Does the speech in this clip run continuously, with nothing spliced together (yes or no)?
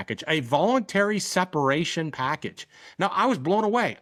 yes